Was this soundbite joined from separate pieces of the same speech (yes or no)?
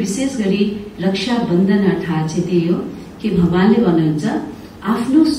no